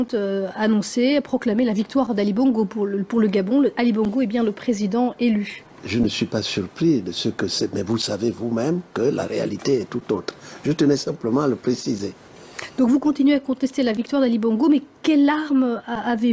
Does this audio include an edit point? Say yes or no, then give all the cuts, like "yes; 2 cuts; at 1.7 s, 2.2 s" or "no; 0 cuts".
yes; 1 cut; at 4.6 s